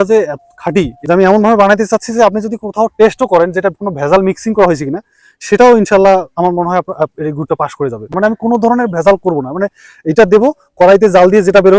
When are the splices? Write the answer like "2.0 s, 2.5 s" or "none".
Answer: 1.0 s, 8.1 s